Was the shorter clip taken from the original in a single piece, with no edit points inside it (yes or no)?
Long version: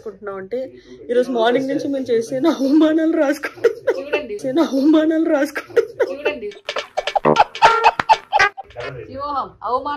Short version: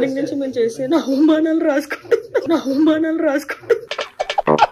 no